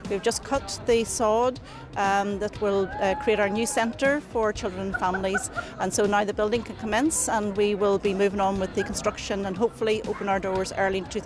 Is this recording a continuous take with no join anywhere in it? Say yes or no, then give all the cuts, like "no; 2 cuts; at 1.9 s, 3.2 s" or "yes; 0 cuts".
yes; 0 cuts